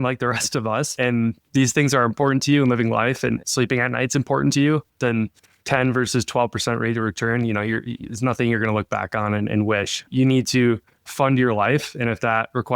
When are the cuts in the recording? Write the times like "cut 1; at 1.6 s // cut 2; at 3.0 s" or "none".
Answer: cut 1; at 0.9 s